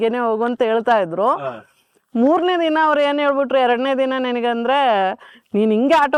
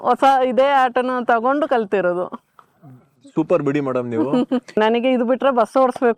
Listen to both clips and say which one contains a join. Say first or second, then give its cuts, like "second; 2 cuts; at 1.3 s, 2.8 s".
second; 1 cut; at 4.7 s